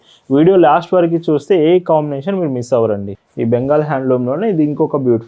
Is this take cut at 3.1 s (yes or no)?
yes